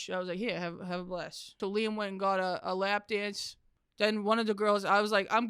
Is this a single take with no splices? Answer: no; 1 cut; at 1.6 s

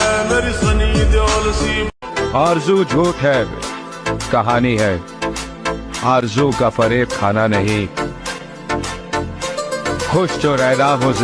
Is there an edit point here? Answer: yes; 1 cut; at 1.9 s

